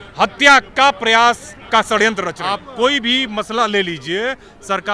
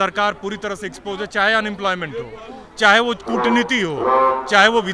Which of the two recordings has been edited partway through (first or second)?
first